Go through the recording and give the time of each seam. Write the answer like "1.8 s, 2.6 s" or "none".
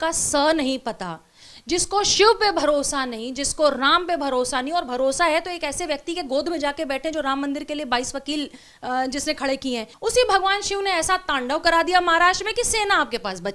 9.9 s